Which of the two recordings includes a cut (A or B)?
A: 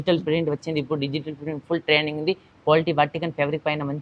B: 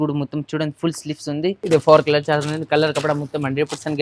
B